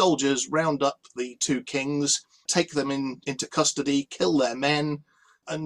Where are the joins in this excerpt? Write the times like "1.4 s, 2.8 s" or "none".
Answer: 2.5 s